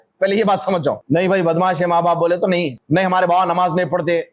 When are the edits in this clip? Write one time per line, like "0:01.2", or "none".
0:01.0
0:02.8